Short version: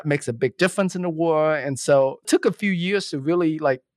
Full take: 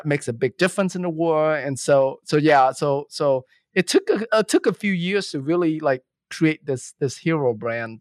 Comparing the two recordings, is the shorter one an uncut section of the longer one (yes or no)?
no